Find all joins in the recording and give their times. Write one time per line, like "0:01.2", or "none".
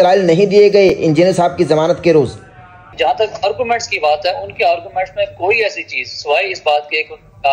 0:02.9